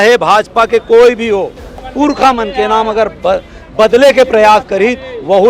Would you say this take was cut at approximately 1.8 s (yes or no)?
yes